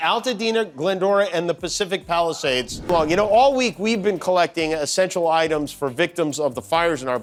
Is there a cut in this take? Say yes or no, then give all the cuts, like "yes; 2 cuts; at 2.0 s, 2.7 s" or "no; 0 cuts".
no; 0 cuts